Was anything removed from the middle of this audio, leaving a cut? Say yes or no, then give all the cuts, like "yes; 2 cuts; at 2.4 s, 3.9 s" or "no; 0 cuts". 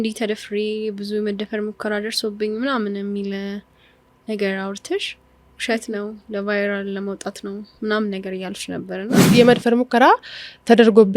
yes; 1 cut; at 9.3 s